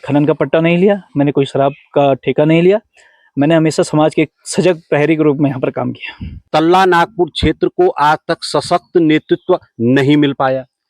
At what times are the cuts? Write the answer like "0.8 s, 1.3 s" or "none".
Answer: 6.5 s

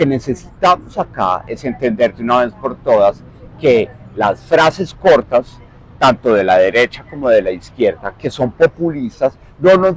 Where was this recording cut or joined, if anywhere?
none

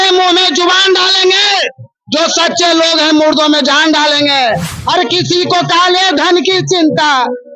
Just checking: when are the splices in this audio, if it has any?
4.7 s

